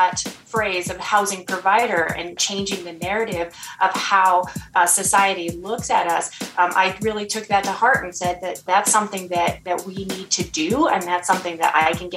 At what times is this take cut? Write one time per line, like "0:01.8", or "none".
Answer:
0:02.4
0:08.6